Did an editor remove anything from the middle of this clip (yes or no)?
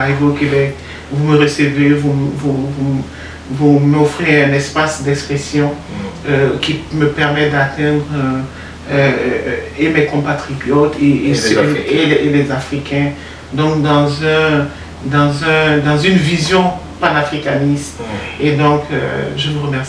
no